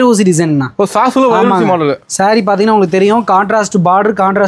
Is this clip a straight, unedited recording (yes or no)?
yes